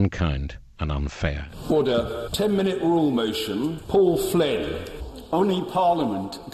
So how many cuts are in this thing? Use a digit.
3